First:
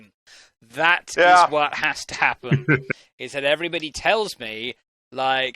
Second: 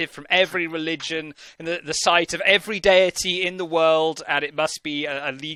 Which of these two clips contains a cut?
first; 1 cut; at 2.8 s

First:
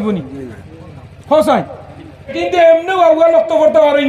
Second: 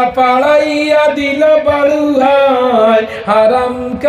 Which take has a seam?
first; 1 cut; at 2.4 s

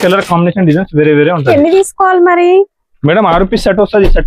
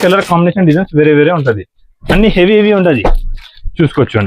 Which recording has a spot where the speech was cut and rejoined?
first; 1 cut; at 1.5 s

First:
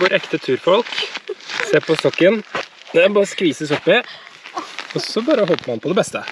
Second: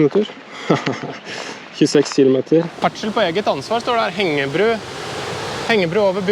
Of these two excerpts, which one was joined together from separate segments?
second; 1 cut; at 2.7 s

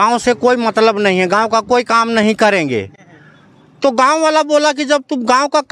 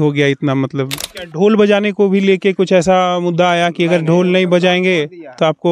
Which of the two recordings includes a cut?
second; 1 cut; at 1.0 s

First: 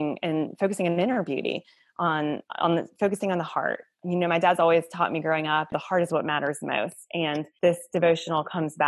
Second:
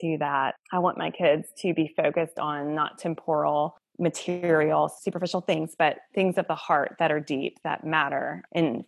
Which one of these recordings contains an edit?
first; 2 cuts; at 5.7 s, 7.5 s

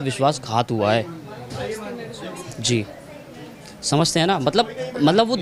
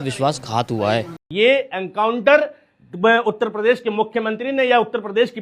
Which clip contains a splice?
second; 1 cut; at 1.2 s

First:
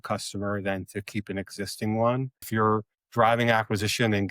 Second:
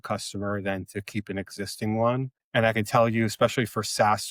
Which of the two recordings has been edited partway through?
first; 1 cut; at 2.5 s

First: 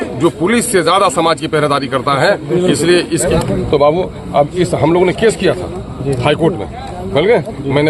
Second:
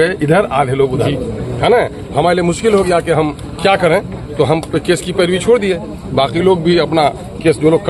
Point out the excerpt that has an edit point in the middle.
first; 1 cut; at 3.3 s

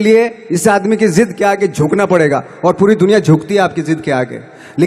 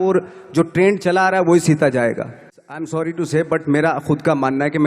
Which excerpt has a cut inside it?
second; 1 cut; at 2.8 s

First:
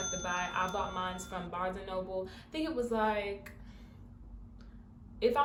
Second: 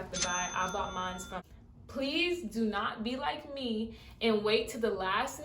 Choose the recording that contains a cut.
second; 1 cut; at 1.4 s

